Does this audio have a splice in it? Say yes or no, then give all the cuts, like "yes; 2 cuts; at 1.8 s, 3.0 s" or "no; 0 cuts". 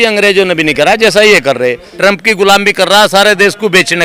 yes; 1 cut; at 1.9 s